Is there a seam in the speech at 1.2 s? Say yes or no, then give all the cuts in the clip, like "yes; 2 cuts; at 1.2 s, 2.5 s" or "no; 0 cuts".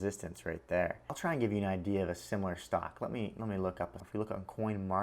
yes; 2 cuts; at 1.2 s, 4.0 s